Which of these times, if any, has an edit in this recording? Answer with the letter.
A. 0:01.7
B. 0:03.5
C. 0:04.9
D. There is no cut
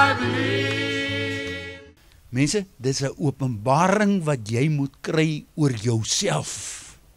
A